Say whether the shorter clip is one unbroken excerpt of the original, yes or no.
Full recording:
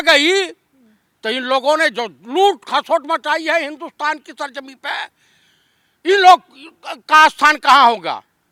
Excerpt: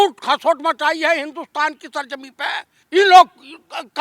no